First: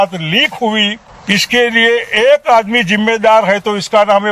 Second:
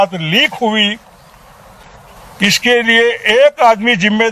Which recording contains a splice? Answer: first; 1 cut; at 1.1 s

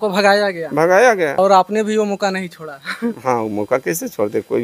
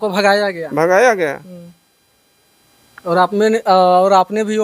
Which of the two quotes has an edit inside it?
first; 1 cut; at 1.4 s

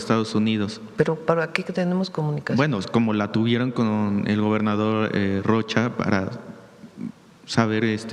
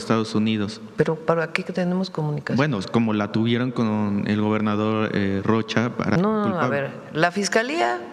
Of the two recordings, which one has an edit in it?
second; 1 cut; at 6.2 s

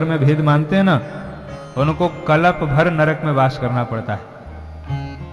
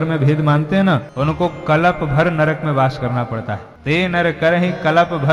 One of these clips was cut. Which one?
second; 2 cuts; at 1.1 s, 3.7 s

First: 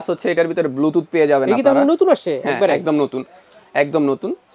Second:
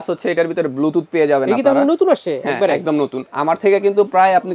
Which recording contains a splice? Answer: second; 1 cut; at 3.2 s

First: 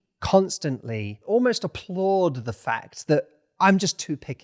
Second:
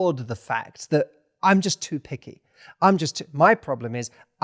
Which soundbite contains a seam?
first; 1 cut; at 1.2 s

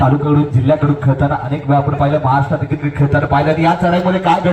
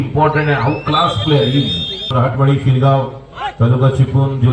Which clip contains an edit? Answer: second; 1 cut; at 2.1 s

